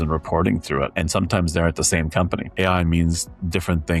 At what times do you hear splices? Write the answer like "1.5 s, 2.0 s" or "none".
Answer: 2.6 s

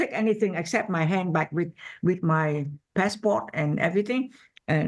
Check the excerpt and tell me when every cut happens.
none

